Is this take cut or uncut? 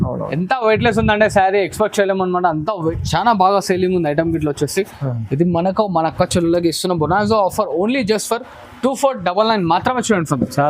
cut